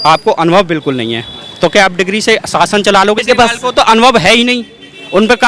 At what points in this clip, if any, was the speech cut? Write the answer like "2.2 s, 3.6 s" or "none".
3.2 s